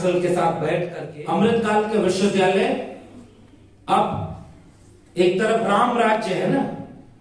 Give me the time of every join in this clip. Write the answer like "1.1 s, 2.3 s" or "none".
1.0 s